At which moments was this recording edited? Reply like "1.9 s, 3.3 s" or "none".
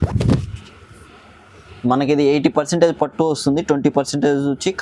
none